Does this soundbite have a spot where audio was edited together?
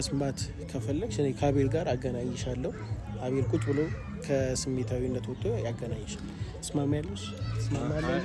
no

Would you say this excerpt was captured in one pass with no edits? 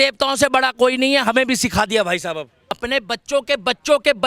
no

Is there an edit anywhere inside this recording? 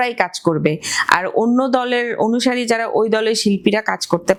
no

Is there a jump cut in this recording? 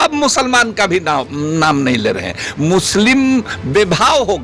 no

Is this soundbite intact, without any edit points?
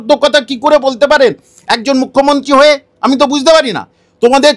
yes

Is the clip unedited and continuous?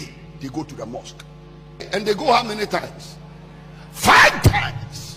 no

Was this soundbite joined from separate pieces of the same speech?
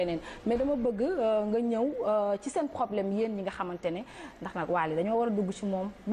no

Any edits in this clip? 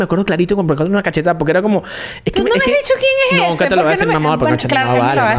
no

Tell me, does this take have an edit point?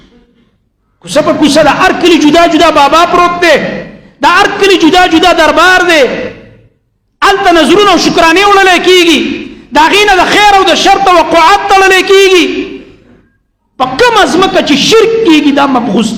no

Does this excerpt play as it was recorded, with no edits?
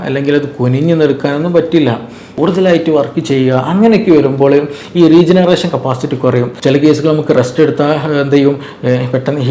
no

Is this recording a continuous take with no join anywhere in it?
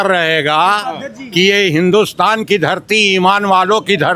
yes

